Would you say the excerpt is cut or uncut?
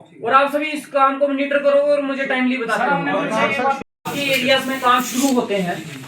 cut